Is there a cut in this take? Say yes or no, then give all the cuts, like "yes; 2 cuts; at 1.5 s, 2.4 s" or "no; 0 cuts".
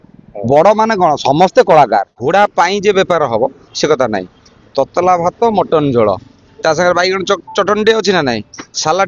yes; 1 cut; at 2.2 s